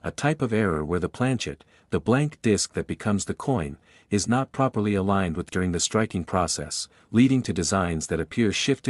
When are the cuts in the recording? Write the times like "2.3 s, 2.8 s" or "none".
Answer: 5.5 s